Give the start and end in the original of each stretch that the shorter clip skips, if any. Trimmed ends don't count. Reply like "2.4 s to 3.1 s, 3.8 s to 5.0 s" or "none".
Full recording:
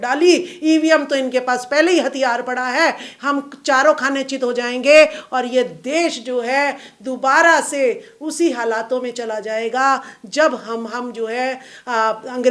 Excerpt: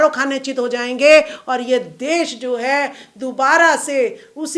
none